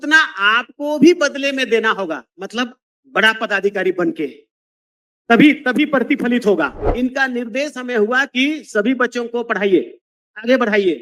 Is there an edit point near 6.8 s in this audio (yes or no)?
yes